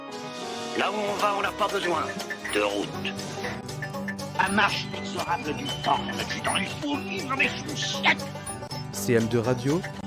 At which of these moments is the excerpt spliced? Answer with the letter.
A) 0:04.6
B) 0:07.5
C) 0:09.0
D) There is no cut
C